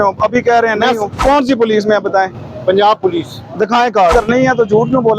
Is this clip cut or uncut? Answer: cut